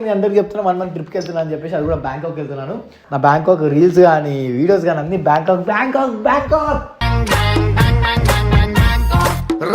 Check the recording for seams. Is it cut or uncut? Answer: cut